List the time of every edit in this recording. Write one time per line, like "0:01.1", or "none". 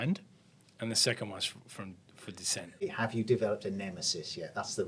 0:02.8